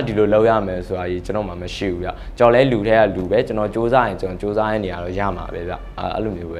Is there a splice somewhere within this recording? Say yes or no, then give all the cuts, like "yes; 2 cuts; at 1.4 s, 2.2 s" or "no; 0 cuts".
no; 0 cuts